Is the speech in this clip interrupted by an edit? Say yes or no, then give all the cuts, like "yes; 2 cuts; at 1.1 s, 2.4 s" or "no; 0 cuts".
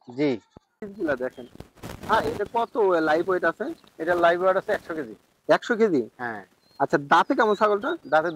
yes; 1 cut; at 0.9 s